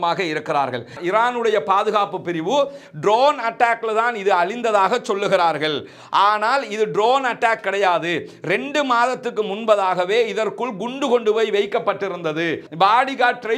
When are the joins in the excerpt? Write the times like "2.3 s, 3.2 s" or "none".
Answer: 0.9 s, 12.6 s